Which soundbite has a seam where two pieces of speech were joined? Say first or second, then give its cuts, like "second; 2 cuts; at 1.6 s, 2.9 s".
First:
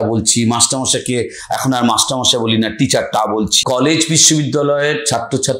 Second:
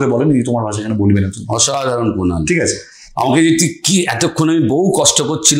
first; 1 cut; at 3.6 s